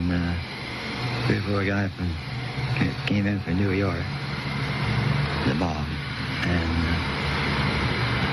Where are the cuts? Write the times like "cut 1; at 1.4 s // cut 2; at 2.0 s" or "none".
cut 1; at 3.0 s

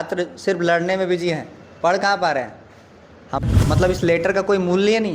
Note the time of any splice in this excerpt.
cut 1; at 3.4 s

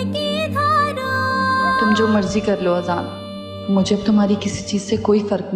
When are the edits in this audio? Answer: cut 1; at 1.8 s

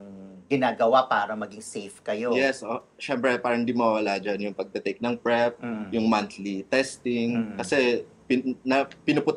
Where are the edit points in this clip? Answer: none

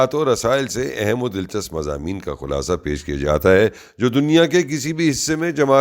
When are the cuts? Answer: cut 1; at 4.5 s

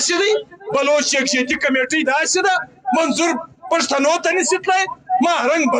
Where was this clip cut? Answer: none

